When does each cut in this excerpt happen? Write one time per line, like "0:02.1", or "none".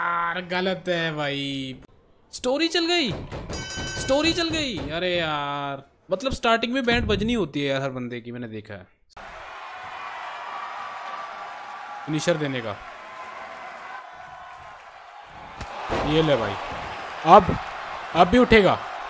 0:01.8
0:05.9
0:09.2
0:14.0